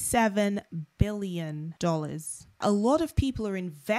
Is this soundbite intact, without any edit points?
no; 2 cuts; at 1.7 s, 2.6 s

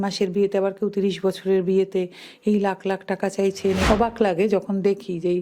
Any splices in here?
yes; 1 cut; at 3.8 s

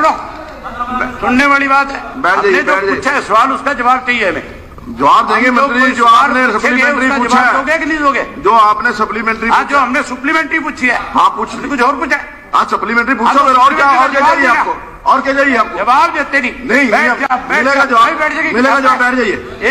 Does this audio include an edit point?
no; 0 cuts

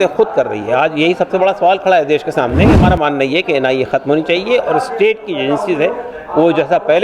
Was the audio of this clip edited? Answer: yes; 1 cut; at 2.8 s

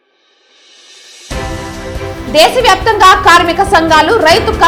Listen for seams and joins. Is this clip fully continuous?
yes; 0 cuts

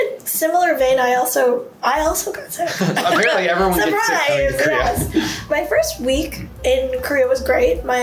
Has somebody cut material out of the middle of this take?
no; 0 cuts

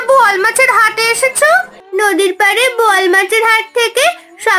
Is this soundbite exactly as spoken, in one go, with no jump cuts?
no; 1 cut; at 1.8 s

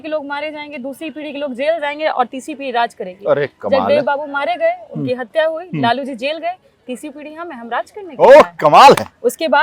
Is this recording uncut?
yes; 0 cuts

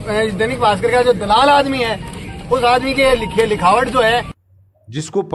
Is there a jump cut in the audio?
yes; 1 cut; at 4.3 s

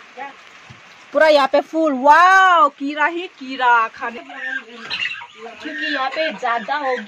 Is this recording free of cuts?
no; 1 cut; at 4.1 s

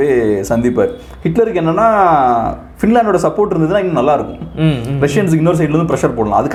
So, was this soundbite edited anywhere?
no; 0 cuts

